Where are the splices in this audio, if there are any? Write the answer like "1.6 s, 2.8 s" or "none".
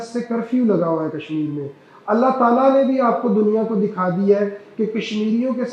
none